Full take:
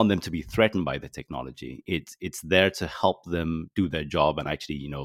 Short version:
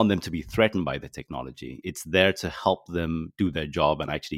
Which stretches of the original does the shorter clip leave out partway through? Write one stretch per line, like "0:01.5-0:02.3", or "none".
0:01.7-0:02.1